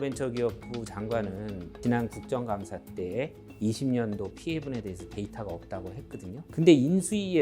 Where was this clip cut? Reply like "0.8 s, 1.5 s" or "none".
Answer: 1.8 s, 6.5 s